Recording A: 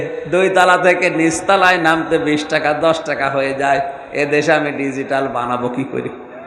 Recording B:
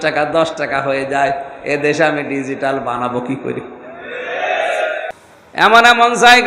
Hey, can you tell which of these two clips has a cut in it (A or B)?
B